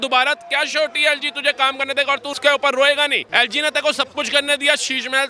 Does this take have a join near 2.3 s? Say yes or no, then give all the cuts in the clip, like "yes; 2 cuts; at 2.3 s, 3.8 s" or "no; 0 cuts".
yes; 2 cuts; at 2.3 s, 3.2 s